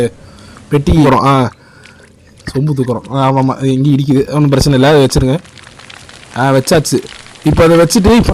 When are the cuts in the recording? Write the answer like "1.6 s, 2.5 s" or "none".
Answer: 1.1 s